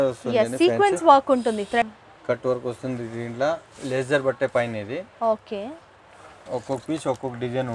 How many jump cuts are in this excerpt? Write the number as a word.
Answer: two